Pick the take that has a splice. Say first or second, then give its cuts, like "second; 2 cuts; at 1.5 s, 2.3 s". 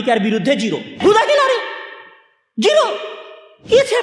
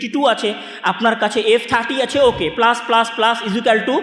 first; 1 cut; at 0.9 s